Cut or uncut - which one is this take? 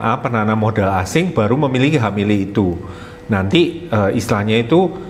uncut